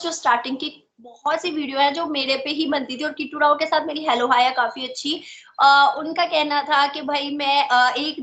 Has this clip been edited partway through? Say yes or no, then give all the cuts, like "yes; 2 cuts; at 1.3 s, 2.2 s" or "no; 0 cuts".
no; 0 cuts